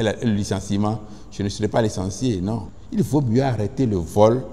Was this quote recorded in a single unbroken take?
no; 1 cut; at 2.8 s

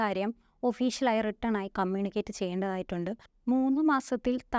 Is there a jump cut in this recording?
yes; 1 cut; at 3.3 s

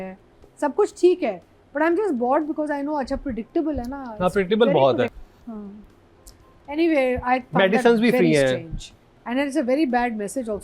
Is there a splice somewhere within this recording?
yes; 1 cut; at 5.2 s

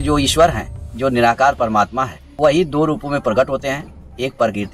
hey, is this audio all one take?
no; 1 cut; at 2.2 s

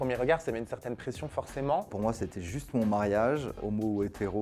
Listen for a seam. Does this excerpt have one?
yes; 1 cut; at 1.9 s

